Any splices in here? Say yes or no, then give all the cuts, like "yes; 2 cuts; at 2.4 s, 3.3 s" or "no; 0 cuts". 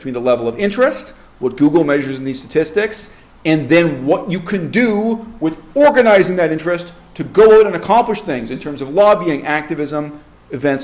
no; 0 cuts